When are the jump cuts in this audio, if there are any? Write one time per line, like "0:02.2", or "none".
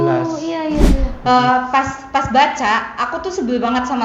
0:01.1